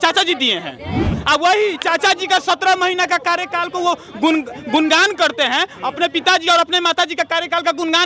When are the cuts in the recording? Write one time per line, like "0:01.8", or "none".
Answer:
0:01.2